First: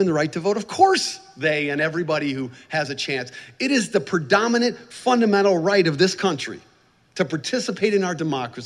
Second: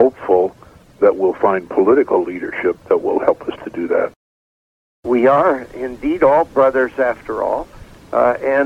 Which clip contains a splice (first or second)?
second